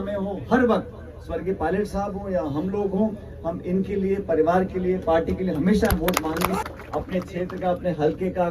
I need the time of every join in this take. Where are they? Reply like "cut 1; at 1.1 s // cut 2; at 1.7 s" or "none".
cut 1; at 6.6 s